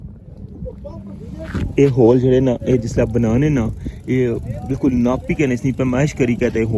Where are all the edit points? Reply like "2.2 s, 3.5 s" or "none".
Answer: none